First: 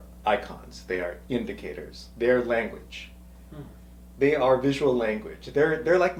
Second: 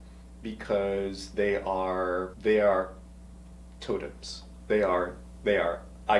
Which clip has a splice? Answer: second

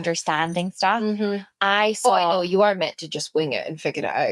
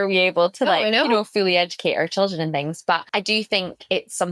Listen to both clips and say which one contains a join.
second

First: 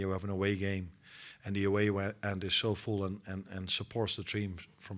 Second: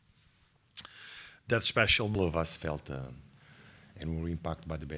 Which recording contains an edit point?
second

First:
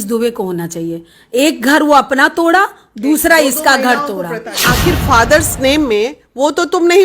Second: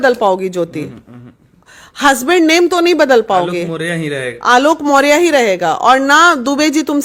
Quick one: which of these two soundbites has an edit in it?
first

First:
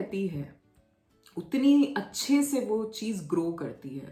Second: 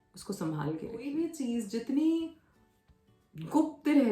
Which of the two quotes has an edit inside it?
second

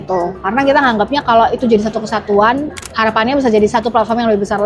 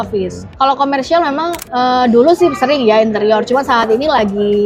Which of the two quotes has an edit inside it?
second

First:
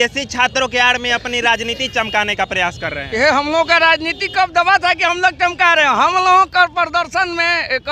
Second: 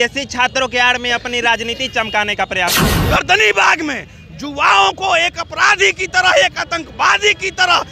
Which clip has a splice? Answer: second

